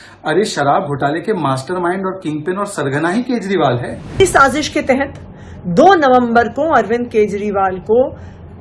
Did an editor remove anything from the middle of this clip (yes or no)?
yes